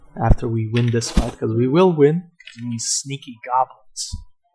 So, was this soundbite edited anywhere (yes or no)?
no